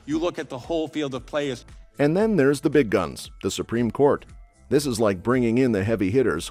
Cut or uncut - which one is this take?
uncut